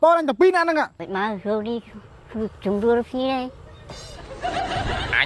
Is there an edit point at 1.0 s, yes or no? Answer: yes